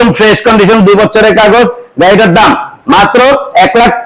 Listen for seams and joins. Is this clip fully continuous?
yes; 0 cuts

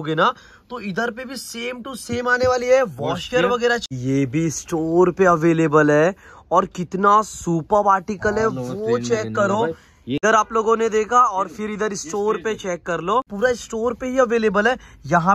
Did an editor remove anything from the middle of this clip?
yes; 3 cuts; at 3.9 s, 10.2 s, 13.3 s

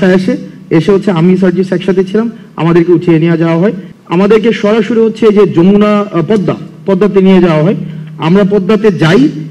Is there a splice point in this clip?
yes; 1 cut; at 3.9 s

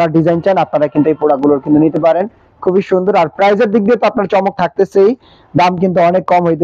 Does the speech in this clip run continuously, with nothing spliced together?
yes; 0 cuts

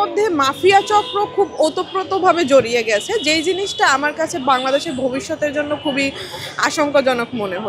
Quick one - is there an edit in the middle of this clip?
no; 0 cuts

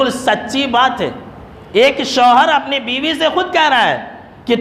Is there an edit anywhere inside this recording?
no; 0 cuts

